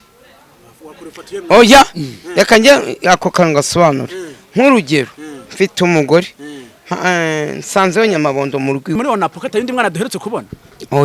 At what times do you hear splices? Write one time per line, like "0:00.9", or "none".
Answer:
0:09.0